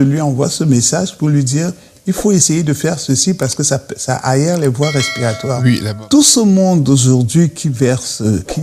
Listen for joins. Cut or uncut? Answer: cut